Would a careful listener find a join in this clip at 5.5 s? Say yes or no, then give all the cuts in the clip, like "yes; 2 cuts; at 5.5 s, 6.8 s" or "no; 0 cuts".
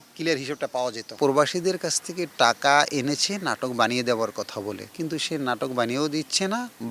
no; 1 cut; at 1.2 s